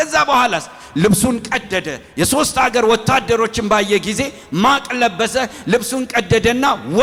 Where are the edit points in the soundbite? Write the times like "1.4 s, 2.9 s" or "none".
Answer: none